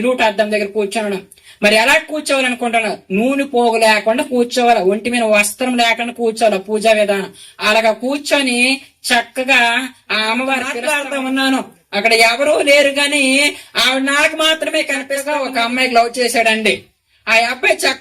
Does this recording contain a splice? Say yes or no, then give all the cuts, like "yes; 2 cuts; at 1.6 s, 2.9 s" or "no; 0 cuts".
yes; 2 cuts; at 10.7 s, 15.2 s